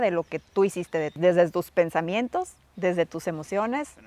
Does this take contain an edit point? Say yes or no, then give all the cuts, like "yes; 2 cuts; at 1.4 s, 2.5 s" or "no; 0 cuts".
yes; 1 cut; at 1.2 s